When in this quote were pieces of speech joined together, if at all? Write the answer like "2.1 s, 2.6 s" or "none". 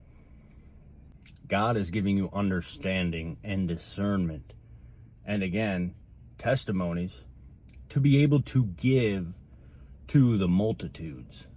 1.2 s